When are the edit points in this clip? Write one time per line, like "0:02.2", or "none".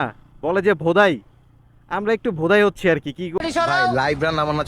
0:03.4